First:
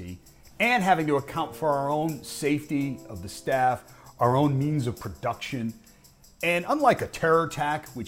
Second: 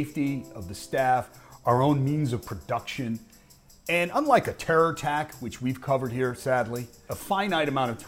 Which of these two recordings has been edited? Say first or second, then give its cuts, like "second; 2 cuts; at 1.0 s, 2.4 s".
second; 1 cut; at 7.1 s